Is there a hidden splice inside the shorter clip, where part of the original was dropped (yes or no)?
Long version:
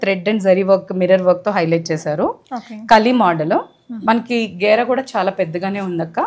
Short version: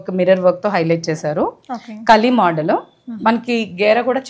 no